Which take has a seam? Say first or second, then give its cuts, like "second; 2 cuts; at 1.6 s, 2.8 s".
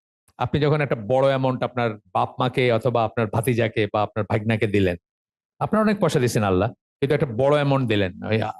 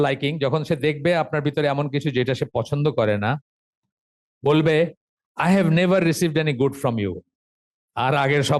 first; 2 cuts; at 2.0 s, 6.8 s